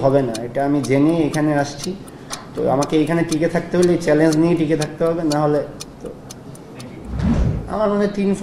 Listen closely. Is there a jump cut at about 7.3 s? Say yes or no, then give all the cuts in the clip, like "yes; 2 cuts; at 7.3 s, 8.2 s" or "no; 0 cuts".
yes; 1 cut; at 7.3 s